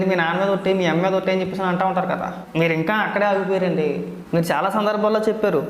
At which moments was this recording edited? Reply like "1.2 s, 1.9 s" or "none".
2.4 s, 4.1 s

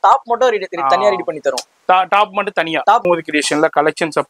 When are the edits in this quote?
3.1 s

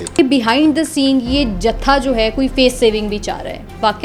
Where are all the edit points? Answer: none

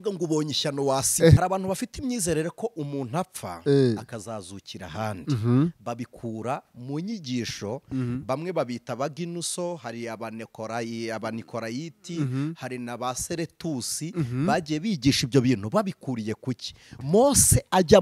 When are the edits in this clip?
1.4 s, 16.9 s

